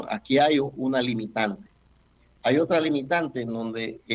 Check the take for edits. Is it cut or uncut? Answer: uncut